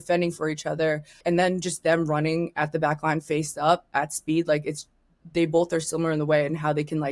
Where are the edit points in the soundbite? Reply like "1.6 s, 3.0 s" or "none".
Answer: 1.2 s